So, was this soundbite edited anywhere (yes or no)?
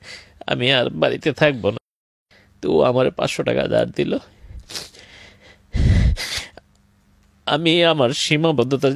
yes